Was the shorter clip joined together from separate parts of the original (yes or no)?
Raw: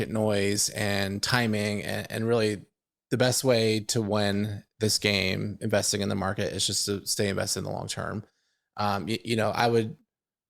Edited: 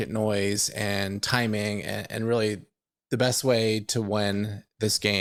no